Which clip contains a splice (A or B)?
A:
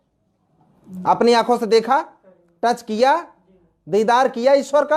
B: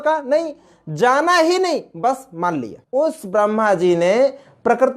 B